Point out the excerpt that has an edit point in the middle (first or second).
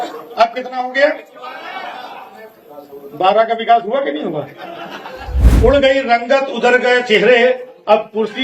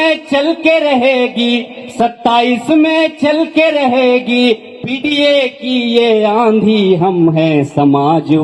first